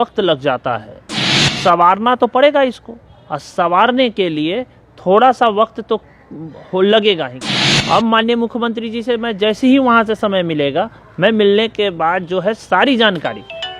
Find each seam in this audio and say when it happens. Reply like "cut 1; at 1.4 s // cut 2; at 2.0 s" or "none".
cut 1; at 1.2 s // cut 2; at 7.4 s